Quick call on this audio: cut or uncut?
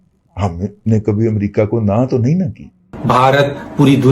cut